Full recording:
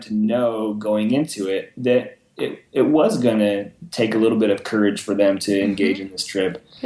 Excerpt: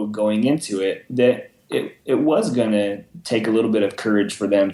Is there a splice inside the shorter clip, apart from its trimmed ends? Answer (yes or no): no